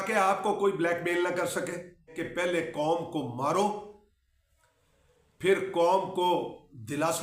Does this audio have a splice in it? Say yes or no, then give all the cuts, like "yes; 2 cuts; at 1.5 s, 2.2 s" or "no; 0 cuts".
yes; 1 cut; at 2.1 s